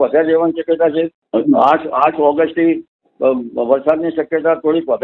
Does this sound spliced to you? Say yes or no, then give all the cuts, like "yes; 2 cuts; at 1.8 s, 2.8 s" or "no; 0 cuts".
yes; 1 cut; at 1.2 s